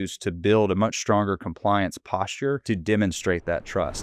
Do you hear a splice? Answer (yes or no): yes